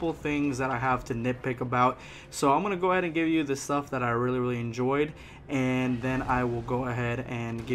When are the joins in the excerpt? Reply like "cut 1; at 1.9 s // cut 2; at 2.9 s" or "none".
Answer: none